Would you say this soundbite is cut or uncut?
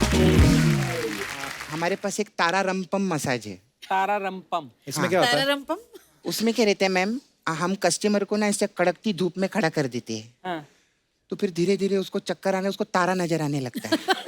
cut